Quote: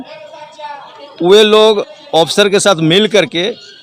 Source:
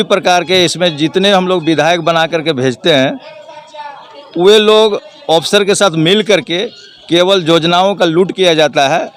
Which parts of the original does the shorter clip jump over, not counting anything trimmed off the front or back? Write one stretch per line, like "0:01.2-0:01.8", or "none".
none